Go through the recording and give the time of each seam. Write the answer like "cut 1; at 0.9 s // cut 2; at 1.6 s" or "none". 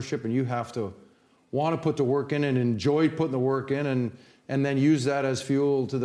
none